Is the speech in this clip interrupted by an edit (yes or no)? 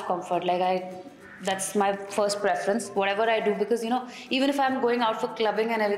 no